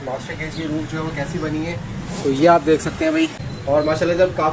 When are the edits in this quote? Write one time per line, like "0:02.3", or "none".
0:03.3